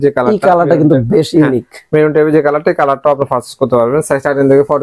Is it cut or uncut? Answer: uncut